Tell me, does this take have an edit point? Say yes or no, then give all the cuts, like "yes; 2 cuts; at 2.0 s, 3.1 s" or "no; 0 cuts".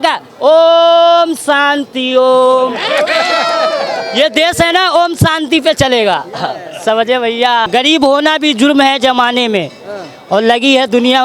yes; 1 cut; at 7.7 s